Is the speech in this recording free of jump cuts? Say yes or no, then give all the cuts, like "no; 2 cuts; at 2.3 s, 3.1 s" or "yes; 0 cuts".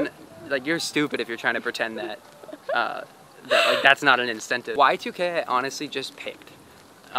no; 1 cut; at 4.7 s